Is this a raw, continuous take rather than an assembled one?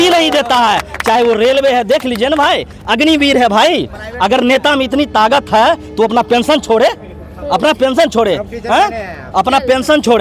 yes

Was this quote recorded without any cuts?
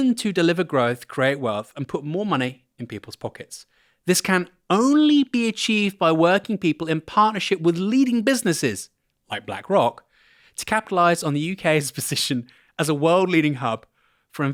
yes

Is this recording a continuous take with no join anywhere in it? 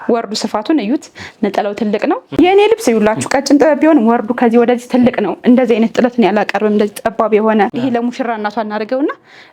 no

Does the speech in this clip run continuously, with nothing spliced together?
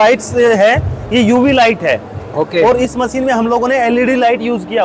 yes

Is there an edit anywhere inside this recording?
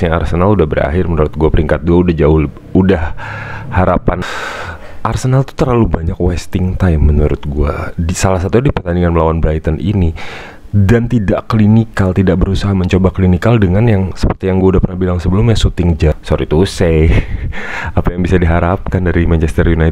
yes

